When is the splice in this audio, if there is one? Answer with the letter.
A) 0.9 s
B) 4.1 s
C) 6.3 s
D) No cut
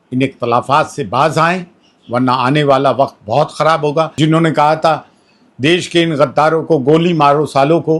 B